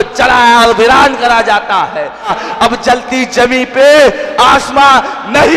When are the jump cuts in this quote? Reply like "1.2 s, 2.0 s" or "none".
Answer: 2.4 s